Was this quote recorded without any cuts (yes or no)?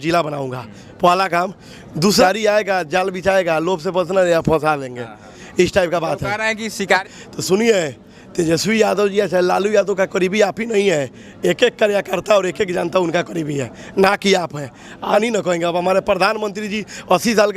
no